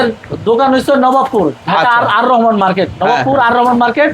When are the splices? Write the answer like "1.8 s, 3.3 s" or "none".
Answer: none